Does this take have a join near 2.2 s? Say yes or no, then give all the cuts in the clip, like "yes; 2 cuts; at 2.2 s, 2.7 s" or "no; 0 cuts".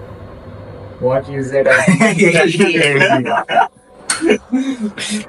no; 0 cuts